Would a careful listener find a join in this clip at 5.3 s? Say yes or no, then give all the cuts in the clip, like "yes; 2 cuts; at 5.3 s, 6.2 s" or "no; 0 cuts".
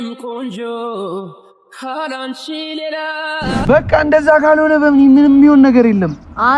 no; 1 cut; at 3.7 s